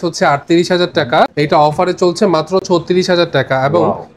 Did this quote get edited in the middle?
no; 0 cuts

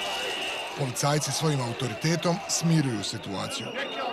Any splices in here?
no; 0 cuts

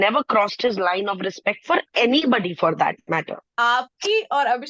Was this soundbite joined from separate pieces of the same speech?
yes; 1 cut; at 3.4 s

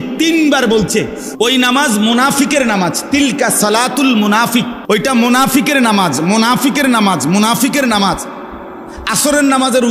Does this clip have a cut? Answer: yes; 2 cuts; at 1.5 s, 4.8 s

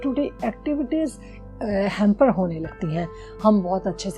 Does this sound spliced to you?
no; 0 cuts

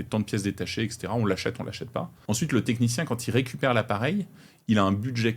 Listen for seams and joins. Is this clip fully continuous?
no; 1 cut; at 2.1 s

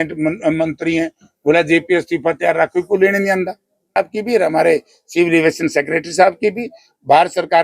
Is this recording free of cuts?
no; 1 cut; at 4.0 s

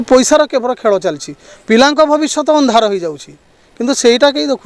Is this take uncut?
yes; 0 cuts

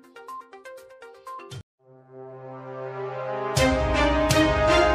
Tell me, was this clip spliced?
no; 0 cuts

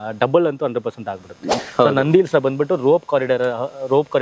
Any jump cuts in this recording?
yes; 1 cut; at 1.5 s

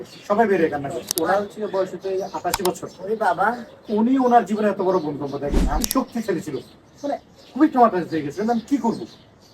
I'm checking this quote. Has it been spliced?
yes; 2 cuts; at 1.0 s, 5.7 s

